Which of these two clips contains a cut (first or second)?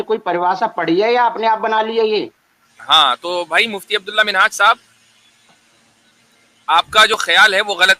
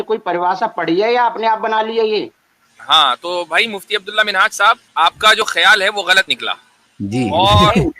second